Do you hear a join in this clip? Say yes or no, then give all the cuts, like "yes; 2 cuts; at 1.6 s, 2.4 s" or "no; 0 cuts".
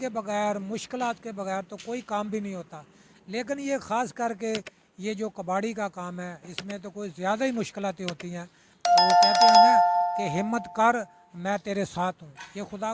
yes; 2 cuts; at 8.7 s, 10.2 s